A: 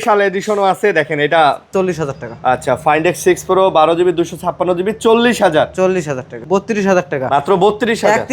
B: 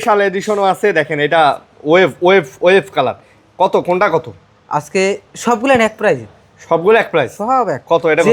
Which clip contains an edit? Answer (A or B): A